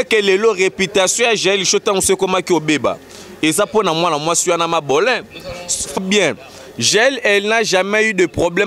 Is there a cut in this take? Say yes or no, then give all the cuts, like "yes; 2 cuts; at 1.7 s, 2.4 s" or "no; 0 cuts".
yes; 1 cut; at 6.0 s